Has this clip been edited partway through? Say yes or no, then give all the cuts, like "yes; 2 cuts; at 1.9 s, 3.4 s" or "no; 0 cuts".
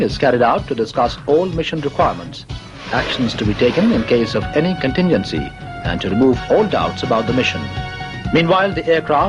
yes; 1 cut; at 6.2 s